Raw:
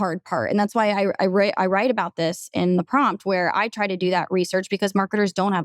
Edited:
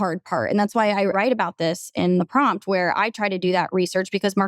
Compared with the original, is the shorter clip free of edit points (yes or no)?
no